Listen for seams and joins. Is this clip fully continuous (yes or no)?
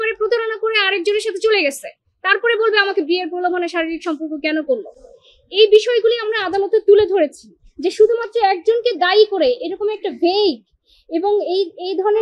yes